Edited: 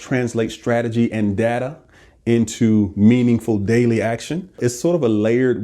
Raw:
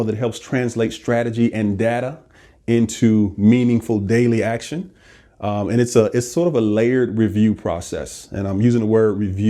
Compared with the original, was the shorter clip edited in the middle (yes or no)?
yes